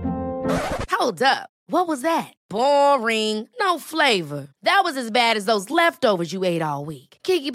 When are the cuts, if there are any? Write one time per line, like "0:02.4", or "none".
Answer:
none